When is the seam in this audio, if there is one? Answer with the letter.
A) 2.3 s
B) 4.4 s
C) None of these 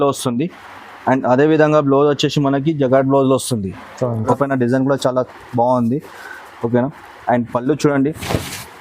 B